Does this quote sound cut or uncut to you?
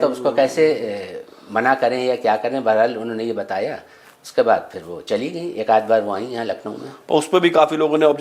uncut